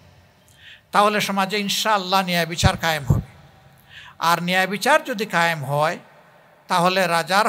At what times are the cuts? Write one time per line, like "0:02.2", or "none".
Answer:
none